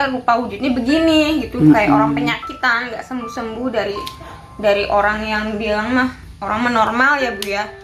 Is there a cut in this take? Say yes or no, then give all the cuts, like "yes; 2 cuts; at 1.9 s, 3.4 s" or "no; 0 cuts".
no; 0 cuts